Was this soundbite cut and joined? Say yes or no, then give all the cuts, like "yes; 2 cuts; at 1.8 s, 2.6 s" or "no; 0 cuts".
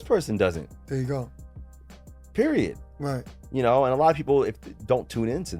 no; 0 cuts